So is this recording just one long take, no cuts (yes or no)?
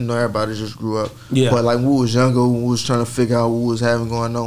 yes